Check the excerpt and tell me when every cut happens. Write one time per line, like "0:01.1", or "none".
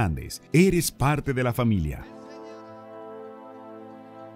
0:02.0